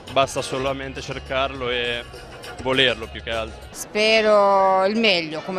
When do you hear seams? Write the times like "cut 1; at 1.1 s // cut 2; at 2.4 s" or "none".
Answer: cut 1; at 3.8 s